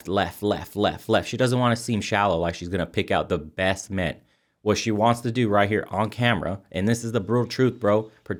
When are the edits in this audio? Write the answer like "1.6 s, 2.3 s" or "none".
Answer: none